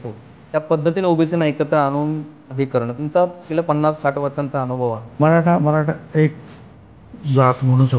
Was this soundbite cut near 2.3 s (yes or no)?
no